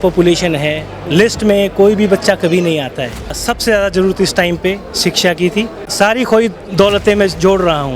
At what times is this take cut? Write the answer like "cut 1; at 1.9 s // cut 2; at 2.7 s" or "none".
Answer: cut 1; at 3.4 s // cut 2; at 5.8 s

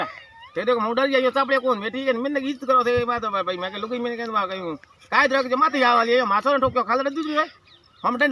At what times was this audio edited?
none

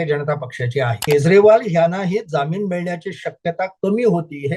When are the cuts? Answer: cut 1; at 1.0 s

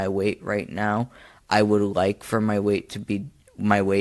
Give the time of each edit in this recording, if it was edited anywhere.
none

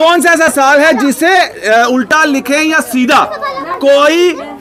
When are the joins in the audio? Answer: none

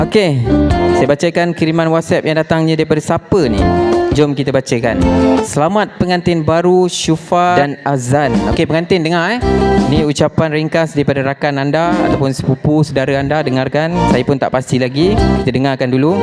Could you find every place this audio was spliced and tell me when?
cut 1; at 7.6 s

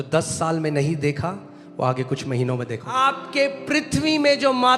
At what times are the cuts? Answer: cut 1; at 2.9 s

